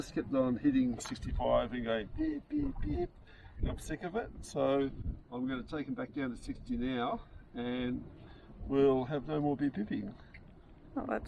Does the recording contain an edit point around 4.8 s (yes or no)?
no